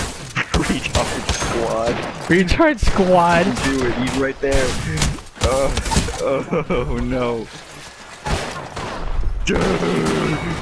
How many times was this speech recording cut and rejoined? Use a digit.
0